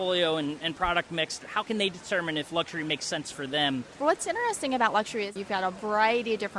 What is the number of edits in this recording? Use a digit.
3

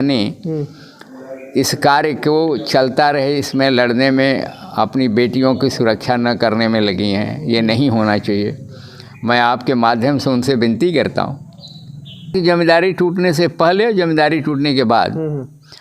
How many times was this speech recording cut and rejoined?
1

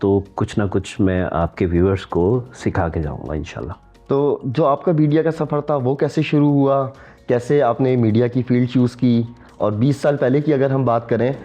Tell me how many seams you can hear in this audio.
0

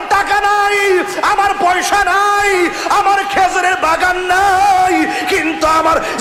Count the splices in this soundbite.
0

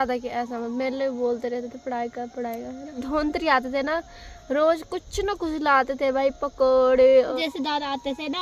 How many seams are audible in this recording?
2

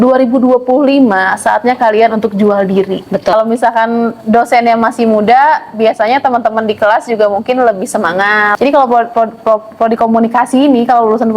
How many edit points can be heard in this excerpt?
2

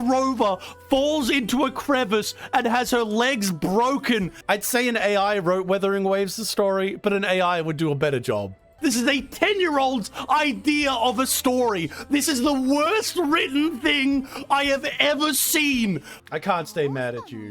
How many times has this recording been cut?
3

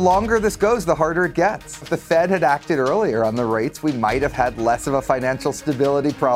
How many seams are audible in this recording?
1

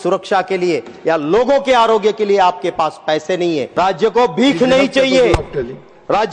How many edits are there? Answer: 1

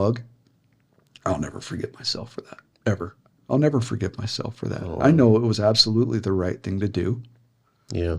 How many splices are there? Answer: 1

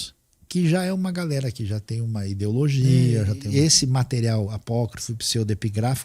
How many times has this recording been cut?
1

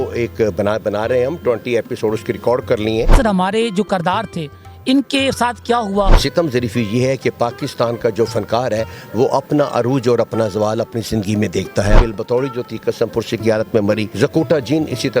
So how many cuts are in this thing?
4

